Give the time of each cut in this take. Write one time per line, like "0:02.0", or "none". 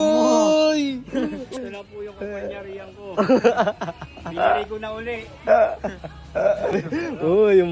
none